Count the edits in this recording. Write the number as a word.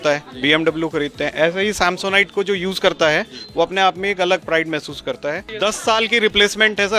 one